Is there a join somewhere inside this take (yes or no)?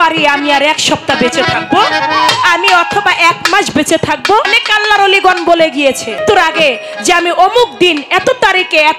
yes